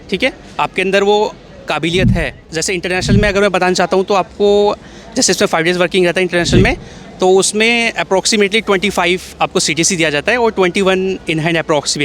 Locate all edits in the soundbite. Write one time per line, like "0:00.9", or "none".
0:02.6